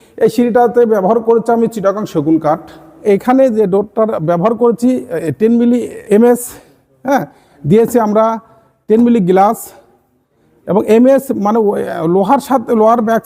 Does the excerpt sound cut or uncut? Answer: cut